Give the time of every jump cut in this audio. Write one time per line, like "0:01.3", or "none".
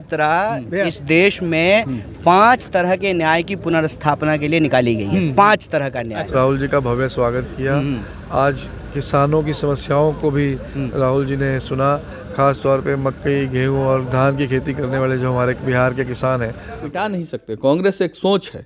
0:06.2
0:16.7